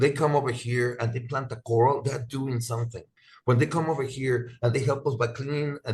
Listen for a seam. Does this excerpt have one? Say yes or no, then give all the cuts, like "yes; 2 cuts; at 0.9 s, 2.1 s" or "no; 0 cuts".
no; 0 cuts